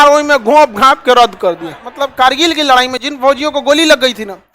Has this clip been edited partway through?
yes; 1 cut; at 1.9 s

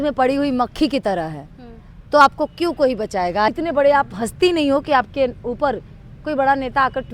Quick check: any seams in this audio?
yes; 1 cut; at 3.5 s

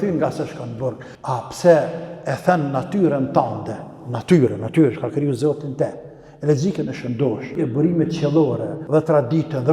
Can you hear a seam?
yes; 3 cuts; at 1.1 s, 7.6 s, 8.7 s

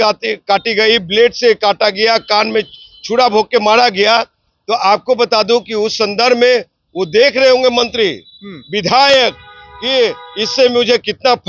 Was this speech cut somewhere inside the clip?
no; 0 cuts

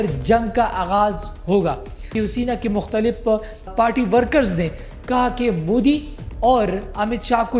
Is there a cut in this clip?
yes; 2 cuts; at 2.0 s, 3.7 s

